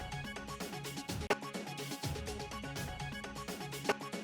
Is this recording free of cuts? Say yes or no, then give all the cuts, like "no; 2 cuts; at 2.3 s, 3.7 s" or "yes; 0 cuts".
no; 1 cut; at 0.9 s